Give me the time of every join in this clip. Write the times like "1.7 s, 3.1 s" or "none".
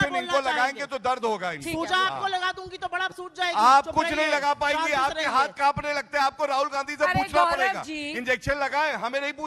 none